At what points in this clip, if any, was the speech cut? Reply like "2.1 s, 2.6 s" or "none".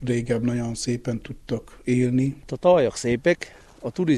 2.4 s